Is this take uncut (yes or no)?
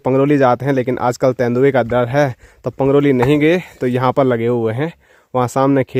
yes